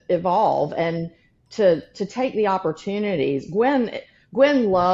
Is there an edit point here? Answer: no; 0 cuts

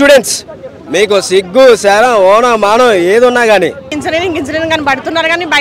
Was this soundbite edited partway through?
yes; 1 cut; at 3.9 s

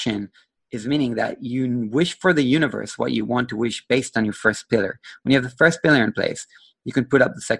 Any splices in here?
no; 0 cuts

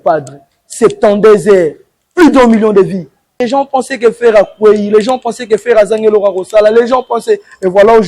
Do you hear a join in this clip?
yes; 1 cut; at 3.4 s

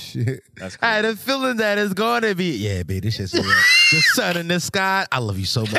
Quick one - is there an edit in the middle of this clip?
no; 0 cuts

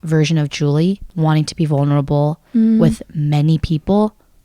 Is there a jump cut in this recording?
yes; 1 cut; at 1.1 s

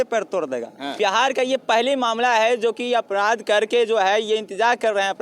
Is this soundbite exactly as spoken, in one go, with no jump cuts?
no; 1 cut; at 0.9 s

